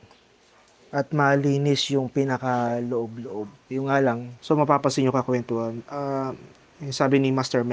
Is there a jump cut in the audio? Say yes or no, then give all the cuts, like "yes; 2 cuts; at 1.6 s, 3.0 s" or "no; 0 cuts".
yes; 1 cut; at 4.3 s